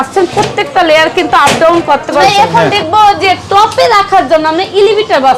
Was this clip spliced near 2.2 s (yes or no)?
yes